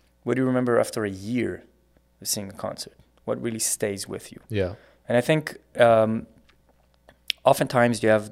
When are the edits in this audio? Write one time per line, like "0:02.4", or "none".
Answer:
none